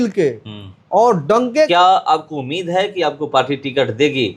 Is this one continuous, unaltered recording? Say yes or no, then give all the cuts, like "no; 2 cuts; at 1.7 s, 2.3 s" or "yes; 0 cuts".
no; 1 cut; at 1.7 s